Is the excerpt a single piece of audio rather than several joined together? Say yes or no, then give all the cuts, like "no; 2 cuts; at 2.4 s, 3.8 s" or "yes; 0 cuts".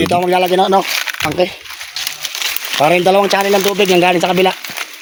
yes; 0 cuts